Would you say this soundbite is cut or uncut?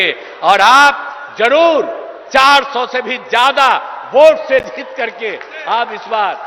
uncut